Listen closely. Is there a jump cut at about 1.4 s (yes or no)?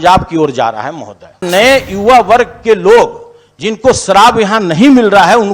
yes